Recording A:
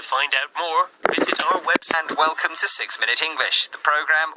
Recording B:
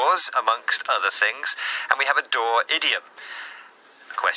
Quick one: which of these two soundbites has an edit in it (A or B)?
A